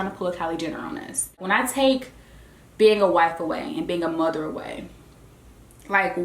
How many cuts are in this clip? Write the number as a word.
one